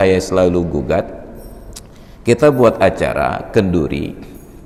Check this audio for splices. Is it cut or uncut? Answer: uncut